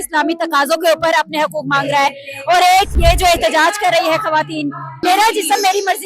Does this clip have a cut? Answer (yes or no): yes